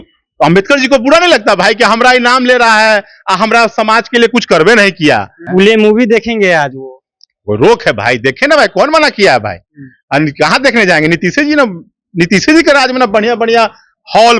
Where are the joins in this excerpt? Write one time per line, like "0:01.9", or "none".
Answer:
0:05.4